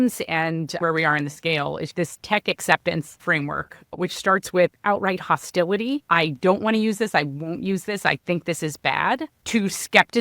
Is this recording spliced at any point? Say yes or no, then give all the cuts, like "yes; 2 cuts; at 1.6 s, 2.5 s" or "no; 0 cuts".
yes; 4 cuts; at 0.8 s, 1.9 s, 3.1 s, 6.0 s